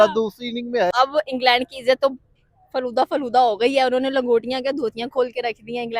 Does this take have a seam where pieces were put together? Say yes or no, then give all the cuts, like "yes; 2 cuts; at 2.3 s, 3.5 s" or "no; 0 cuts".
yes; 1 cut; at 0.9 s